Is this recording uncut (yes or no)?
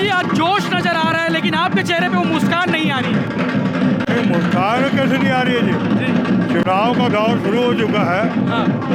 yes